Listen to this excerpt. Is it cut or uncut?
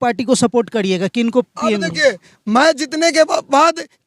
uncut